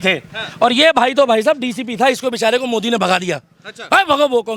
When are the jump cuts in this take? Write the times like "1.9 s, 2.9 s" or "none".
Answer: none